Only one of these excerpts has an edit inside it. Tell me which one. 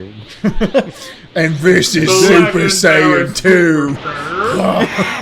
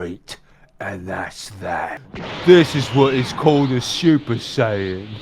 second; 1 cut; at 1.9 s

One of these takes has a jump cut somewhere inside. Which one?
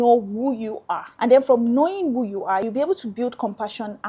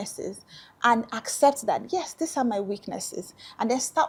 first; 2 cuts; at 1.0 s, 2.7 s

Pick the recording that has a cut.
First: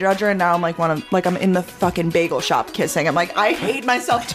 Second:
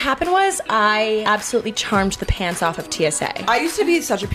second; 2 cuts; at 1.2 s, 3.4 s

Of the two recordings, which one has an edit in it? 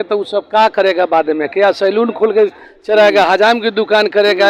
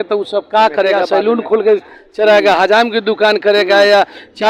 second; 1 cut; at 1.0 s

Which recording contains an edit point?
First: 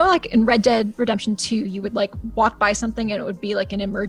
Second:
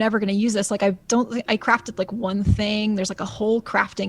second; 1 cut; at 3.1 s

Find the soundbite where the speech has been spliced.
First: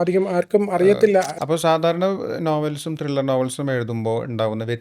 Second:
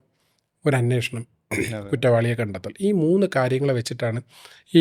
first; 1 cut; at 1.3 s

